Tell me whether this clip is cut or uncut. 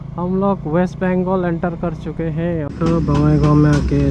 cut